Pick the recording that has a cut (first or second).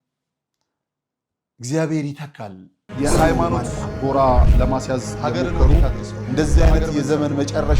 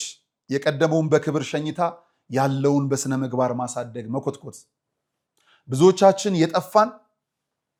first